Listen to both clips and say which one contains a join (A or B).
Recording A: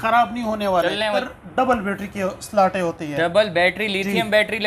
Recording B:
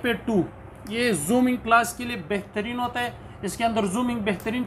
A